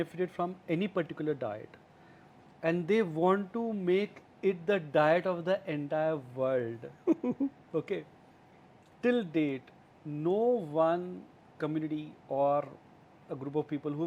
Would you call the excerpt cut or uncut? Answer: uncut